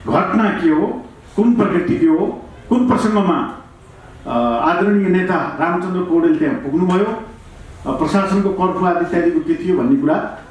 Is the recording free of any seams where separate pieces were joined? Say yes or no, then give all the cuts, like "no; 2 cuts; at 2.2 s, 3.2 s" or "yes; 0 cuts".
yes; 0 cuts